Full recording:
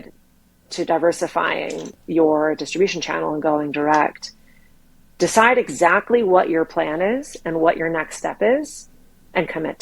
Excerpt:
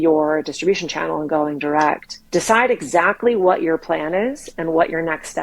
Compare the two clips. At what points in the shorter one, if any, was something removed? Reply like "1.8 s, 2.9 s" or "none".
2.1 s

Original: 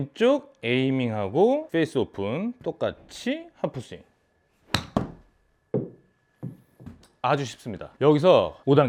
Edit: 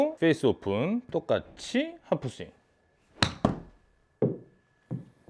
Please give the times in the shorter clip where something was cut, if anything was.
none

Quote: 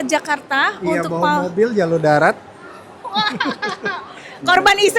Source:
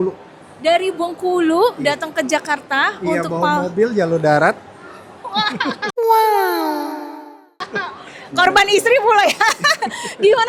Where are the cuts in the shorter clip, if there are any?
3.7 s

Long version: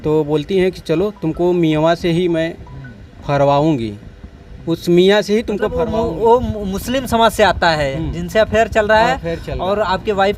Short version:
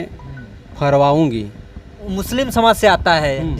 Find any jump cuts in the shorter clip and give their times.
2.0 s

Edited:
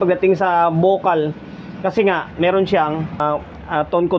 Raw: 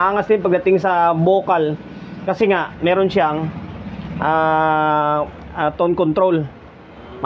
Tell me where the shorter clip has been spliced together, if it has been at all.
3.2 s

